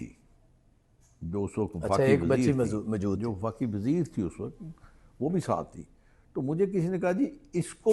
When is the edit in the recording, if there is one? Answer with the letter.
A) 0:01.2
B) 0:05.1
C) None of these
C